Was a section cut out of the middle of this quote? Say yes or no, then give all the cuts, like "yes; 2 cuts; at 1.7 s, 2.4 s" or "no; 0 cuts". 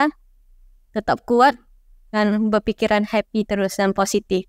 no; 0 cuts